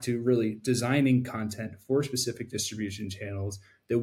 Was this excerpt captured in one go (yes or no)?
yes